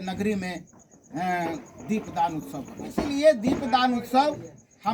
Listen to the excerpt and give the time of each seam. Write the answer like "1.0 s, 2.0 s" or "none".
3.0 s